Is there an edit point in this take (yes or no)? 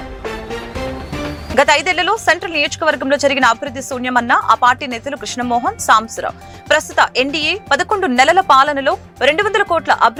no